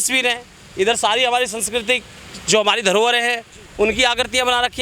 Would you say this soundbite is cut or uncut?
uncut